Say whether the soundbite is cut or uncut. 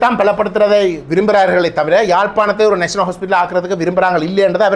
uncut